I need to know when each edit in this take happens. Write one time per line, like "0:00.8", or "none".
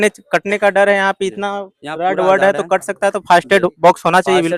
none